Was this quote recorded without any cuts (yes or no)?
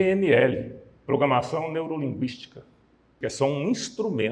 no